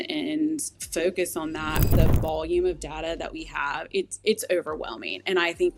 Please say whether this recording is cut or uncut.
cut